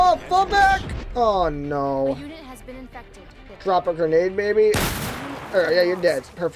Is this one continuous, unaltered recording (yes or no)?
no